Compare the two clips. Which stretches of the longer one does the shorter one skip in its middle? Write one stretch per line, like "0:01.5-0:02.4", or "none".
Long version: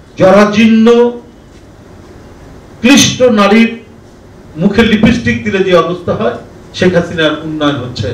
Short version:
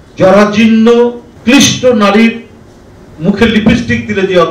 0:01.3-0:02.6